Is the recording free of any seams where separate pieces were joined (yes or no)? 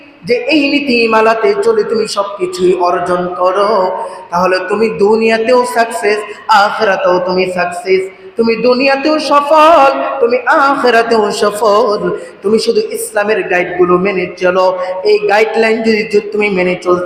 yes